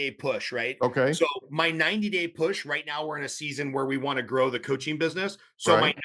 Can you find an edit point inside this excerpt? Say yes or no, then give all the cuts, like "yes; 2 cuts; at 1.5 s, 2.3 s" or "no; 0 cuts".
no; 0 cuts